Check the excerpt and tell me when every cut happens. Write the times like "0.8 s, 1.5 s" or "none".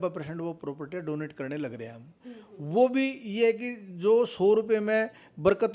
none